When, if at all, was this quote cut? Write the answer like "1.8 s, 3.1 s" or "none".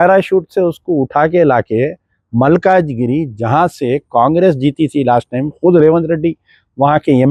none